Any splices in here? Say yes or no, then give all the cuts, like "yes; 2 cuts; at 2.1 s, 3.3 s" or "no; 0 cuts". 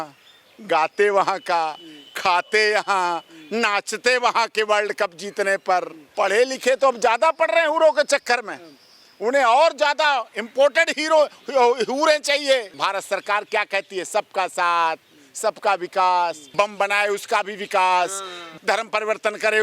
yes; 4 cuts; at 6.0 s, 12.8 s, 16.4 s, 18.5 s